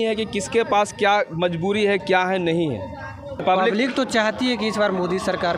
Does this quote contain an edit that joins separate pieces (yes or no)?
yes